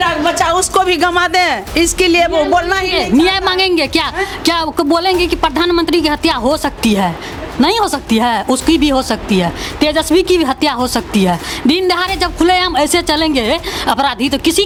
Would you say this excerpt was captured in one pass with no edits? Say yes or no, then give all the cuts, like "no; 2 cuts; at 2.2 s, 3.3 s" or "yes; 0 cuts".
yes; 0 cuts